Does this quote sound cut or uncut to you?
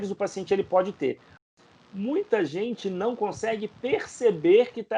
cut